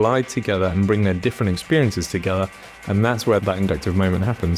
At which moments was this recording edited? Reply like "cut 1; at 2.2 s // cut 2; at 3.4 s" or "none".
cut 1; at 3.4 s

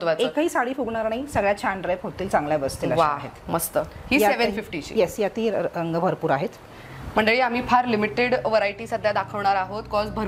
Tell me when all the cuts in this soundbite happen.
none

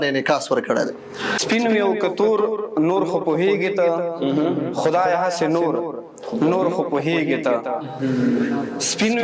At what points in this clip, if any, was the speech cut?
cut 1; at 1.4 s

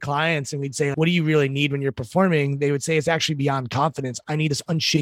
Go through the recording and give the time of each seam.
cut 1; at 0.9 s

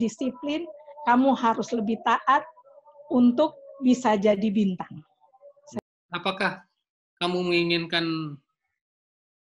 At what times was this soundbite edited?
cut 1; at 5.8 s

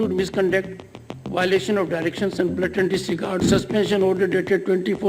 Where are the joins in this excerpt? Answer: cut 1; at 3.4 s

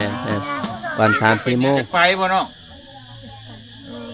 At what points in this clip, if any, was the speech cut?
cut 1; at 1.9 s

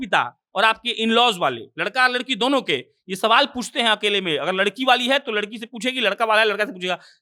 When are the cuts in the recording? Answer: none

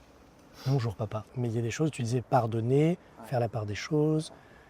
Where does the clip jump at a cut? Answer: cut 1; at 1.3 s

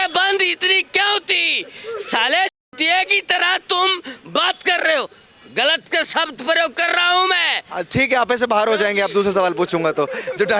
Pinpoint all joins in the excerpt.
none

